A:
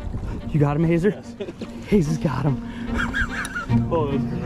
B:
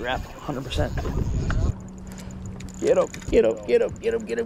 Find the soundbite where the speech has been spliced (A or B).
B